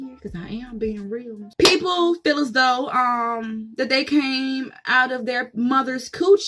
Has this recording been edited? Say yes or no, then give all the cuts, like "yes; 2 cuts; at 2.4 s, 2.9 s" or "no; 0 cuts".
yes; 1 cut; at 1.4 s